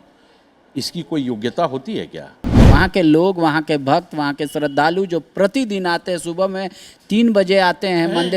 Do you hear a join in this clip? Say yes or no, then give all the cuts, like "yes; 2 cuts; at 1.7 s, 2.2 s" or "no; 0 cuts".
yes; 1 cut; at 2.6 s